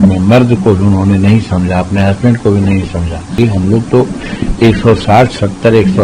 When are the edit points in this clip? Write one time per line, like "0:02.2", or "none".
0:03.4